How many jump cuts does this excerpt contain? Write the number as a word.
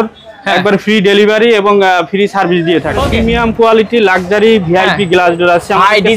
one